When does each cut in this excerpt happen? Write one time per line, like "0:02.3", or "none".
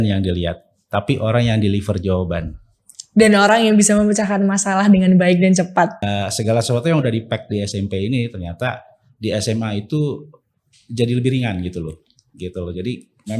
0:06.0